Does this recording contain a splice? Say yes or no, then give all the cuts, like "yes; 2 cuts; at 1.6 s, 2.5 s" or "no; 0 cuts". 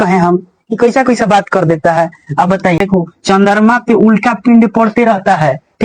yes; 1 cut; at 2.8 s